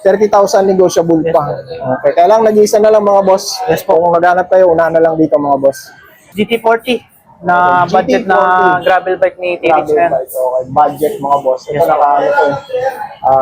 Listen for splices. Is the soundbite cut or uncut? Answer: cut